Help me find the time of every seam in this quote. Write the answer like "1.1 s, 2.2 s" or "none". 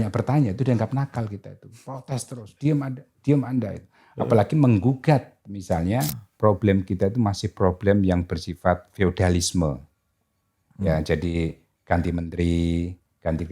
6.2 s